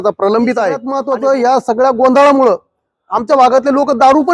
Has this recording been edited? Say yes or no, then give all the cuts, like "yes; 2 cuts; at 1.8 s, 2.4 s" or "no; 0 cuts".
yes; 1 cut; at 0.9 s